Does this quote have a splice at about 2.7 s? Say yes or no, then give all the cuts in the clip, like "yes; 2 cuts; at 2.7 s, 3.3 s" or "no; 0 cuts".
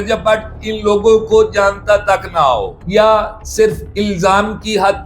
yes; 1 cut; at 2.7 s